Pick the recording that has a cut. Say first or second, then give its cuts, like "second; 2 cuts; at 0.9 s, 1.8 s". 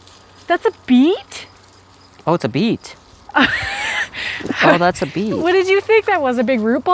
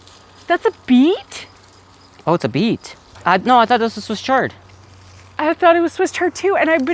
second; 1 cut; at 3.2 s